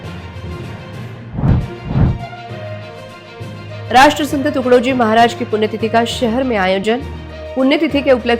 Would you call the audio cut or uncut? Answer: cut